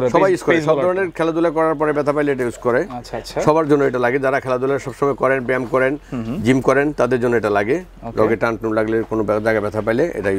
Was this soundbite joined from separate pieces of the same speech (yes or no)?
no